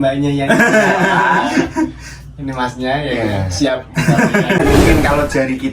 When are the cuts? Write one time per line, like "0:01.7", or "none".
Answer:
0:04.6